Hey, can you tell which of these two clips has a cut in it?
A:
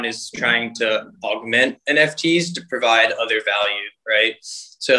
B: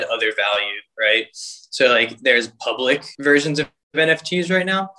B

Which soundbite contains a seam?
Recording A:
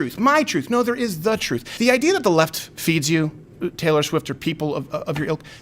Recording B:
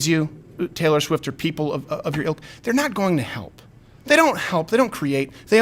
A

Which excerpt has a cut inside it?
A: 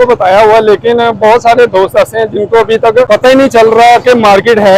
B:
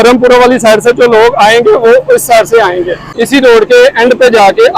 B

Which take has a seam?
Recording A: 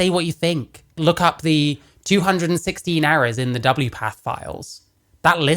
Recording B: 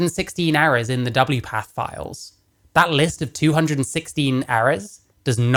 A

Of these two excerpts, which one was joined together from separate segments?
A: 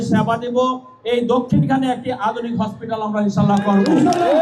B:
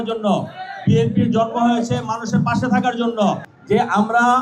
B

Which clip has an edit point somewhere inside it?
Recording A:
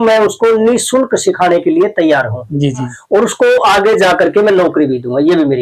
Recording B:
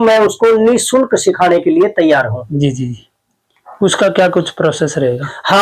A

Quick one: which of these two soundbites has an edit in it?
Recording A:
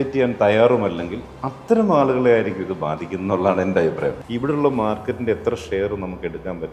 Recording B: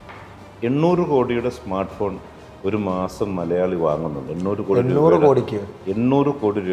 A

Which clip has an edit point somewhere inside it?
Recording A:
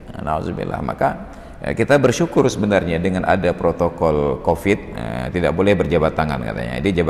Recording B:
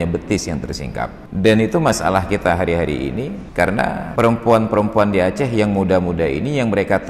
B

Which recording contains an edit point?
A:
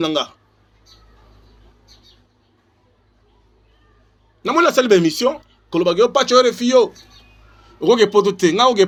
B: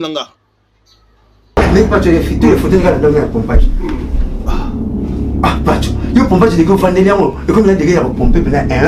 B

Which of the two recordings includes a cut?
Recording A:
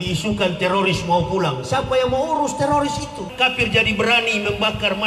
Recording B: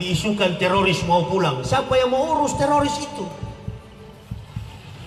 A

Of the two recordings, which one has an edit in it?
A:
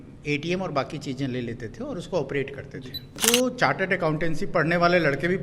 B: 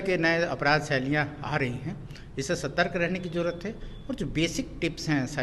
A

